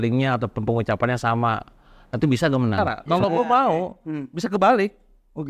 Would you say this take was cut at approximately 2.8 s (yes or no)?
yes